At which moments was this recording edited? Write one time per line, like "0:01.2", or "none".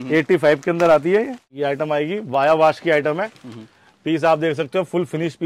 0:01.4